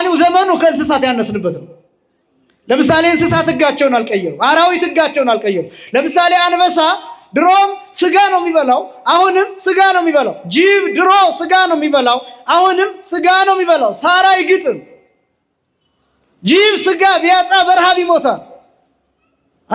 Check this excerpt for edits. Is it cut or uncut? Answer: uncut